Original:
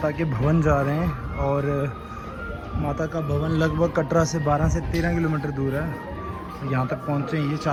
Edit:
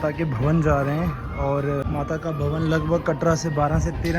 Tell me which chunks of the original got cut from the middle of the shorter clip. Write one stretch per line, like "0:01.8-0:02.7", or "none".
0:01.8-0:02.7